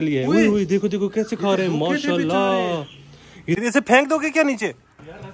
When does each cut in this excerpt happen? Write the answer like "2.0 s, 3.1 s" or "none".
3.6 s

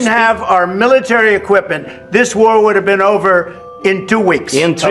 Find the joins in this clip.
none

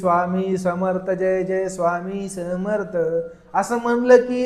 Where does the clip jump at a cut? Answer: none

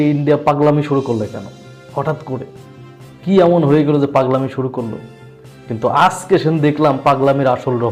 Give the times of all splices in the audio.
none

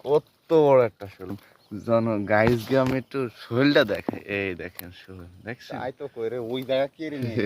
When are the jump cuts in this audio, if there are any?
1.3 s

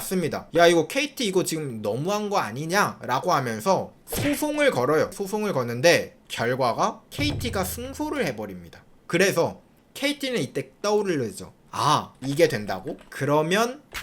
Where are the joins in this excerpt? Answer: 13.0 s

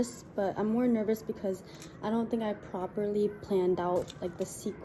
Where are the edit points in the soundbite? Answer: none

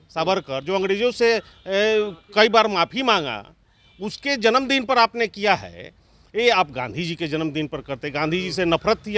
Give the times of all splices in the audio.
none

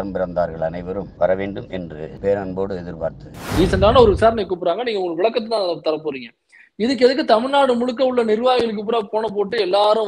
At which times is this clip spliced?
1.1 s, 2.1 s, 3.4 s

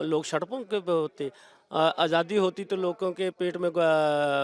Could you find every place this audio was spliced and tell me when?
none

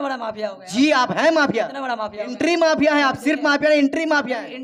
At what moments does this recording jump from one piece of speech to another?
none

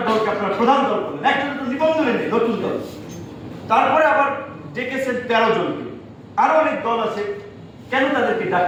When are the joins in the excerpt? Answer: none

